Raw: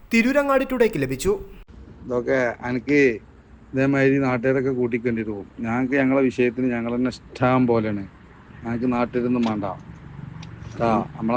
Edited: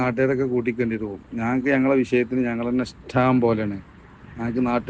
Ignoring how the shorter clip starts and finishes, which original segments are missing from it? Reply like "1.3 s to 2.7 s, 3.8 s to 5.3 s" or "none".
none